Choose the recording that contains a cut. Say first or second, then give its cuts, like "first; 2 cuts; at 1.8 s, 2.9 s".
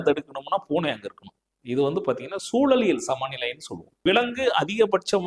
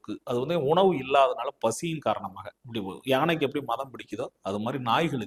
first; 1 cut; at 4.0 s